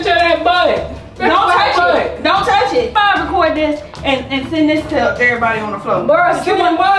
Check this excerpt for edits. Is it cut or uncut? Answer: cut